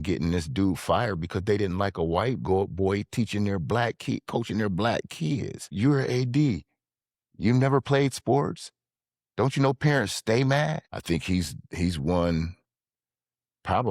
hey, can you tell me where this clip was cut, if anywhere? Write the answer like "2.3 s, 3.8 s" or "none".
5.7 s, 10.9 s